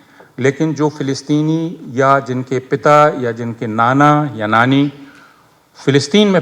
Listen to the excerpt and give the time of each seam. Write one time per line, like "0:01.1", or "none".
none